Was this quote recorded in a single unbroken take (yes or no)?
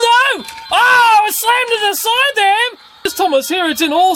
no